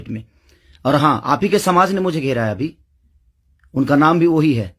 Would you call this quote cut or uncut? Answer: uncut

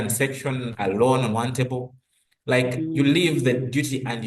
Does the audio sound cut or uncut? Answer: uncut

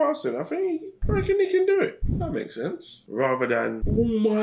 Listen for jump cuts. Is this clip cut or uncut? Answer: cut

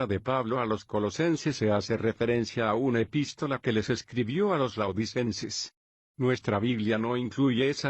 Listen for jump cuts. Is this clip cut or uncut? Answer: cut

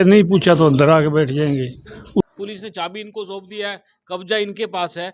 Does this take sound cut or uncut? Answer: cut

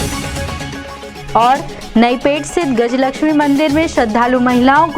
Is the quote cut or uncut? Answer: cut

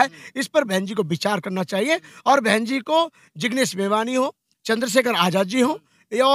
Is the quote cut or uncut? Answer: uncut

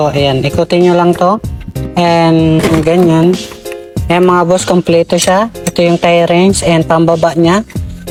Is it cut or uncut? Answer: uncut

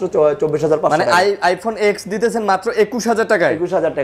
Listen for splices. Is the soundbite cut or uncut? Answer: uncut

